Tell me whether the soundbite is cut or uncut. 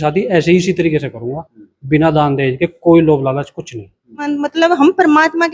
cut